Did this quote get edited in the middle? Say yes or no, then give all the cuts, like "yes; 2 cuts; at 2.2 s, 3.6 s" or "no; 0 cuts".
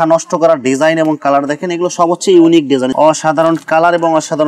yes; 1 cut; at 2.9 s